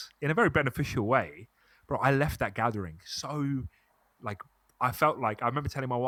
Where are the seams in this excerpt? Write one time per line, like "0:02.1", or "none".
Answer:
none

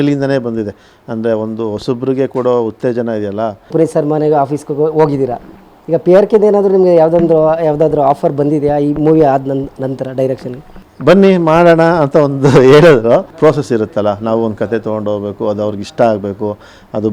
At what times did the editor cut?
0:03.7
0:13.3

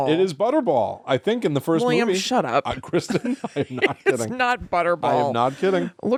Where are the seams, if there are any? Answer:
none

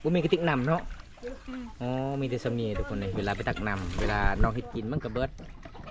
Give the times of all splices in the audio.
none

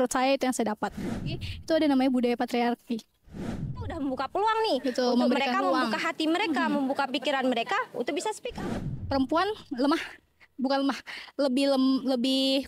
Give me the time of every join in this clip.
0:01.4
0:03.6
0:08.6

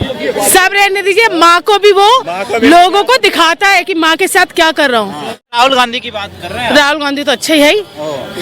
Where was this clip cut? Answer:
0:05.5

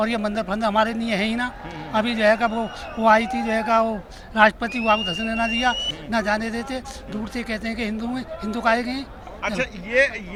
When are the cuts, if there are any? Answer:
none

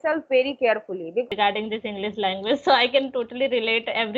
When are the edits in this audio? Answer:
0:01.3

